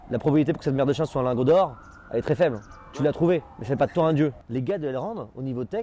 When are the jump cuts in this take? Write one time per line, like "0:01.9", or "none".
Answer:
0:04.4